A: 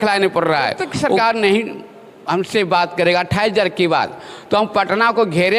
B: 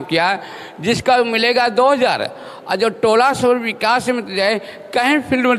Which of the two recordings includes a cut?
A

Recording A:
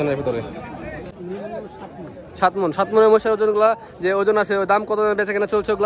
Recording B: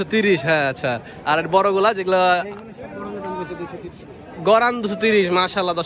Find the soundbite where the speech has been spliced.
A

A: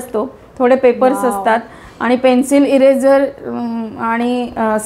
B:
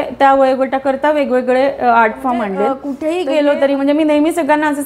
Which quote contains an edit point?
B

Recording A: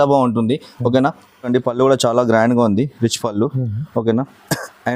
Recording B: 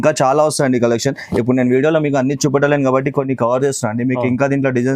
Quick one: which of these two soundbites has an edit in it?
A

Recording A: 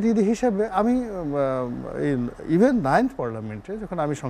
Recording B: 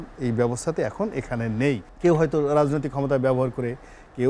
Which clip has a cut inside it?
B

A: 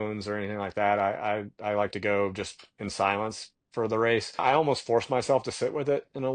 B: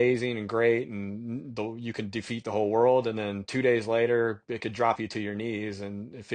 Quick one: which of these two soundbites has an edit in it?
A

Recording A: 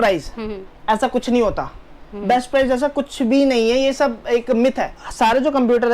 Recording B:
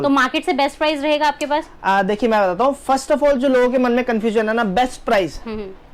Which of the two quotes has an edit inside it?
A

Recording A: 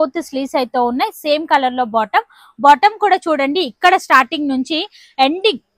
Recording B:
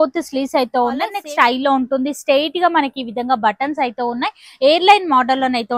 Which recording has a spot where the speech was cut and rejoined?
B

